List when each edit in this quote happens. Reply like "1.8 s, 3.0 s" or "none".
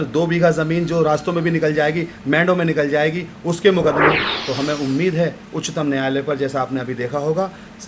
4.3 s